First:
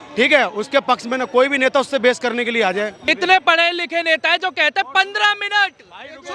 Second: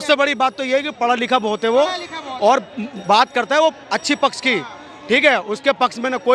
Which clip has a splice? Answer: first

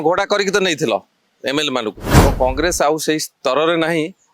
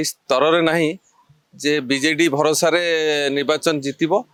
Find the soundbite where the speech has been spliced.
first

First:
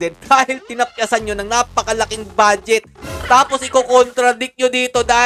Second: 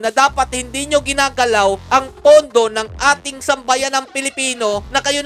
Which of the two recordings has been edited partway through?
first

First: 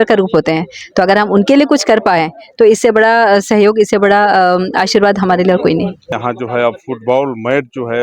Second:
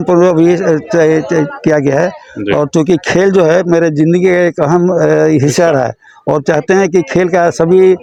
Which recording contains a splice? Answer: first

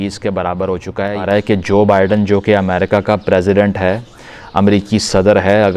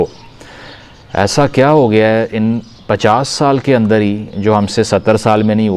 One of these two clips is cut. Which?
first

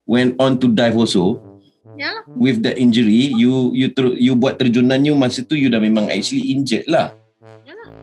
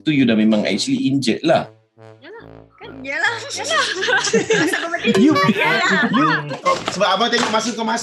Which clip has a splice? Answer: second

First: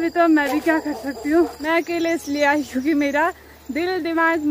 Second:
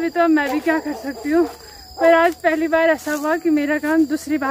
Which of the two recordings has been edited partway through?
first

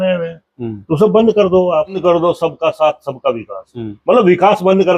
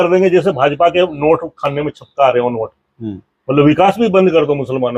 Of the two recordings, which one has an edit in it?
first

